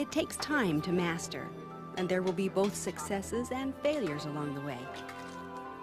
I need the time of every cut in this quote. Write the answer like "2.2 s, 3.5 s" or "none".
2.6 s